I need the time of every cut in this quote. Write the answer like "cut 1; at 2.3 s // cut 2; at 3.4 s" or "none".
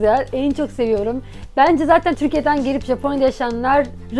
cut 1; at 2.2 s